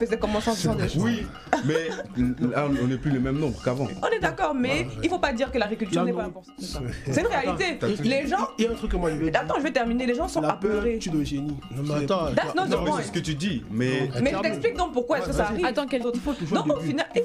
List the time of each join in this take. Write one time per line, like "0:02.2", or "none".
0:06.7
0:16.0